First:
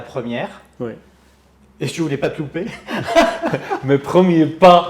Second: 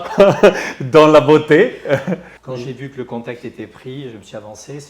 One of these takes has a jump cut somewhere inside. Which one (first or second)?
second